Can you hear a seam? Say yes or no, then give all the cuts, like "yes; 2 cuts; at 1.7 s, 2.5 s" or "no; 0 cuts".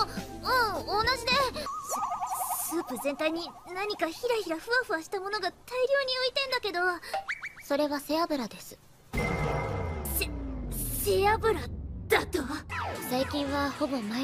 yes; 1 cut; at 6.3 s